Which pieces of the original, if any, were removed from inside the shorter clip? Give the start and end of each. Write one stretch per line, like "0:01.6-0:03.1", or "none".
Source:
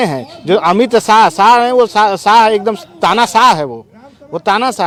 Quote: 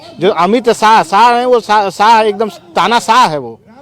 none